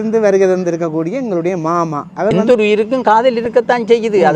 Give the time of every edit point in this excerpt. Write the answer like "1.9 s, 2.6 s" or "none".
2.4 s